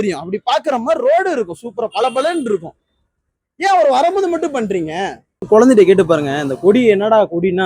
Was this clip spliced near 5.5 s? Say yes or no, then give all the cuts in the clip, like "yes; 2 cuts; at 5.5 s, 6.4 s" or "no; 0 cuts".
yes; 1 cut; at 5.5 s